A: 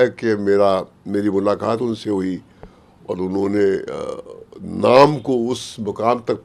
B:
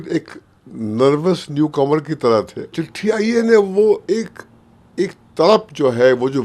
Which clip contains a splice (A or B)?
B